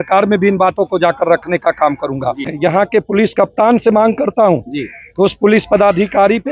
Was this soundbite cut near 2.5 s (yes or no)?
yes